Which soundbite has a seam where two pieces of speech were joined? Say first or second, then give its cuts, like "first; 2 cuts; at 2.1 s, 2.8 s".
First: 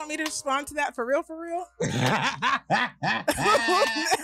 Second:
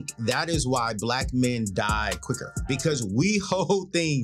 second; 1 cut; at 2.5 s